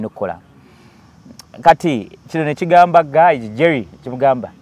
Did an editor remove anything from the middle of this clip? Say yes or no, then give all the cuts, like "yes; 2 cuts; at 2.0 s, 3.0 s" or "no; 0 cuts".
no; 0 cuts